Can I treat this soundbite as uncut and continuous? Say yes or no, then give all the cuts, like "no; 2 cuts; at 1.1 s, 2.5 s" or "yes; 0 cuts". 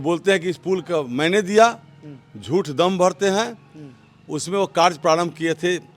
yes; 0 cuts